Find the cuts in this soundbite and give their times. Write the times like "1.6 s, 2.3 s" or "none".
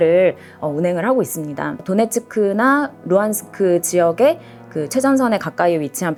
none